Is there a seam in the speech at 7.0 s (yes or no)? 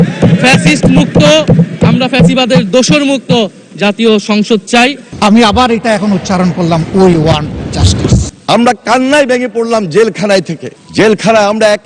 no